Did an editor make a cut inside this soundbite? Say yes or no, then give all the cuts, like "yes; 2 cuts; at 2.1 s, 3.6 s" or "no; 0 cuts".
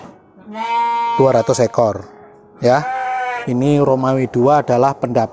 yes; 1 cut; at 3.4 s